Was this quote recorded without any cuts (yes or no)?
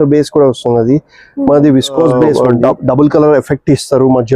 no